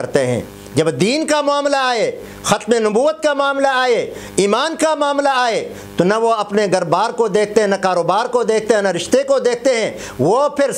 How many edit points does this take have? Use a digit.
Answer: 0